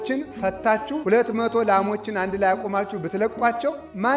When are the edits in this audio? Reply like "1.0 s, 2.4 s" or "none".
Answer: 1.0 s